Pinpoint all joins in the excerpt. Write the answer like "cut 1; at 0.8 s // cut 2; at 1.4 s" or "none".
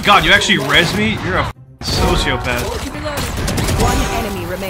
cut 1; at 2.9 s